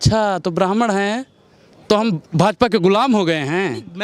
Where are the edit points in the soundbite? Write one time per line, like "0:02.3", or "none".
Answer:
none